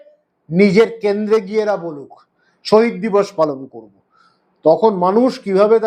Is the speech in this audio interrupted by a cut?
no; 0 cuts

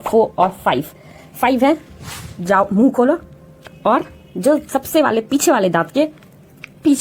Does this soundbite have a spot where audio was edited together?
no; 0 cuts

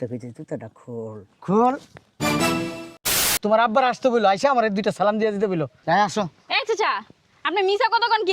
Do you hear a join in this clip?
yes; 1 cut; at 3.3 s

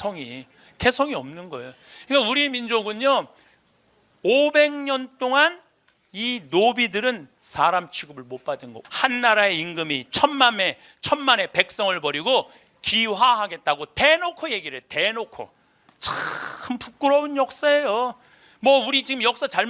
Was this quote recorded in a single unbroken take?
no; 1 cut; at 8.7 s

